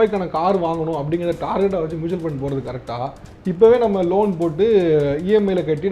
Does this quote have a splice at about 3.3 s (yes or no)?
yes